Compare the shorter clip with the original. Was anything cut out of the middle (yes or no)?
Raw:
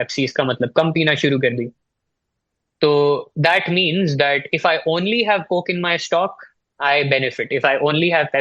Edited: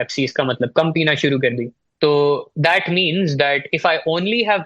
yes